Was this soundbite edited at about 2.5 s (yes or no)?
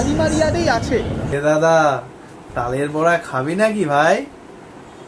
no